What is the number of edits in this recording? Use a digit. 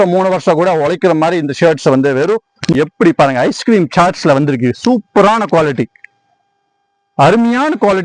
1